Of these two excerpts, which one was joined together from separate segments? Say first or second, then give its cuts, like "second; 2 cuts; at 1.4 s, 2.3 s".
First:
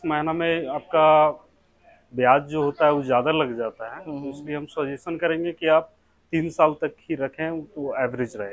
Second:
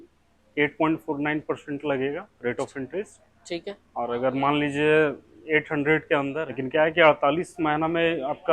second; 1 cut; at 6.4 s